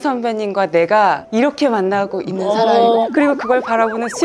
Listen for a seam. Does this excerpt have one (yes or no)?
yes